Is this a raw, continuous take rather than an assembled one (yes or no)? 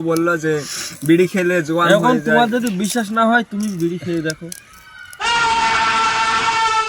yes